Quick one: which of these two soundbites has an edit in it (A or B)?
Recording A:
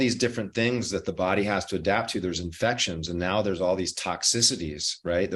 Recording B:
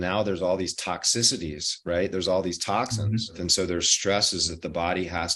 B